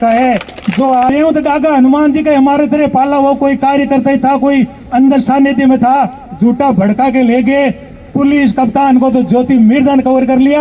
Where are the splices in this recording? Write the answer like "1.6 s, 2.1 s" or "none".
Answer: 1.1 s